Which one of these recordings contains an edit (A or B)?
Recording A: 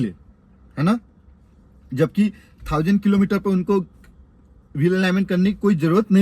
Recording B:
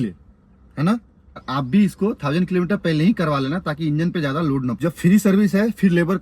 B